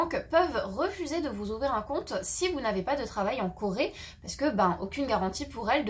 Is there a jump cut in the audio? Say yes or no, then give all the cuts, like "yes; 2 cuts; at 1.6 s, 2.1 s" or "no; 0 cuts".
no; 0 cuts